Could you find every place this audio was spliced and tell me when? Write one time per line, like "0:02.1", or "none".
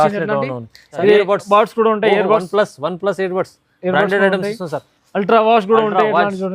0:00.9